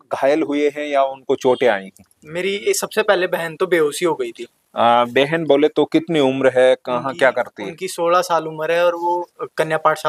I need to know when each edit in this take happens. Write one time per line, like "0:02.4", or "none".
none